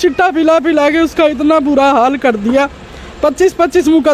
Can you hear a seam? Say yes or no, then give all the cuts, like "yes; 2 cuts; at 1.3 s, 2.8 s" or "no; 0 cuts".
no; 0 cuts